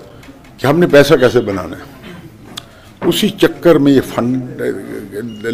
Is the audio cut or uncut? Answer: uncut